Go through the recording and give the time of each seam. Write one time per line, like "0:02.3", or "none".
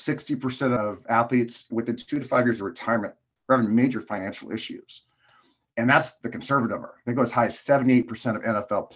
0:00.8
0:01.7